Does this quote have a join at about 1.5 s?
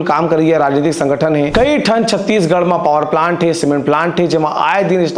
yes; 1 cut; at 1.5 s

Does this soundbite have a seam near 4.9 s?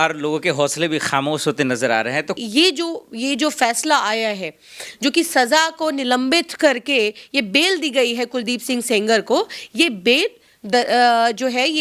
no; 1 cut; at 2.4 s

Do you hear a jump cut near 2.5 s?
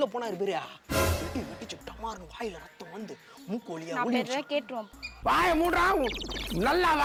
no; 0 cuts

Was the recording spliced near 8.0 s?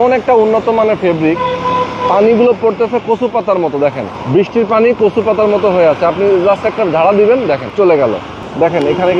yes; 2 cuts; at 4.1 s, 8.0 s

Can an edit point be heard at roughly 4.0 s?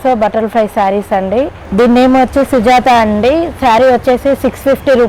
no; 1 cut; at 1.6 s

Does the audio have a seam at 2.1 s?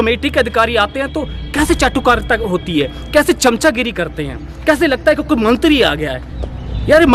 no; 0 cuts

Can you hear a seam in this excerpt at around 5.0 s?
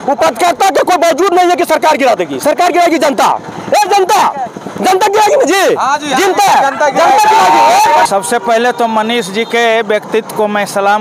no; 1 cut; at 8.0 s

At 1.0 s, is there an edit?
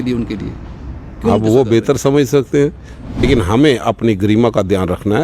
no; 1 cut; at 3.2 s

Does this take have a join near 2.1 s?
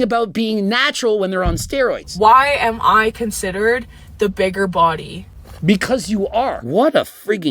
yes; 2 cuts; at 2.1 s, 6.6 s

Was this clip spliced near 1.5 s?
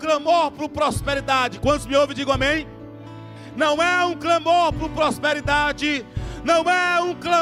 no; 0 cuts

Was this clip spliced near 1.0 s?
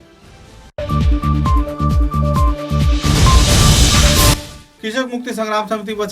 no; 1 cut; at 4.3 s

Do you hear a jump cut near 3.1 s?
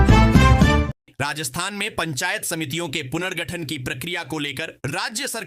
no; 1 cut; at 1.2 s

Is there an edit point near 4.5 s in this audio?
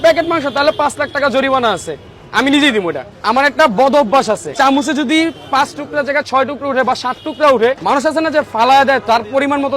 yes; 3 cuts; at 3.1 s, 4.5 s, 7.8 s

